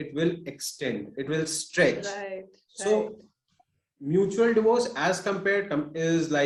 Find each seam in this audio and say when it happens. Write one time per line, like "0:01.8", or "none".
none